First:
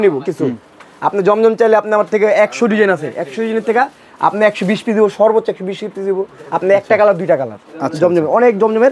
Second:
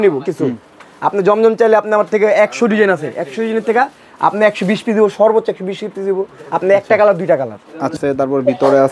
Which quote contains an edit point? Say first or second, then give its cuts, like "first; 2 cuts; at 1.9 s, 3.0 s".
second; 1 cut; at 8.0 s